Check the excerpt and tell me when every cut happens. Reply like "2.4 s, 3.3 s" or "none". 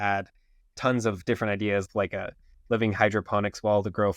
1.9 s